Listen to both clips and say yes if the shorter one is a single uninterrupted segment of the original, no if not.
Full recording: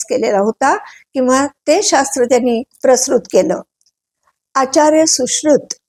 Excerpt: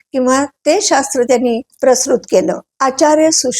no